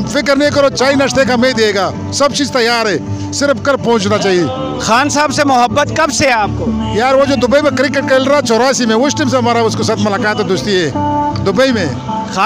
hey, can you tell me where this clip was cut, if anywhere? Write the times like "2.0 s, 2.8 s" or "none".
none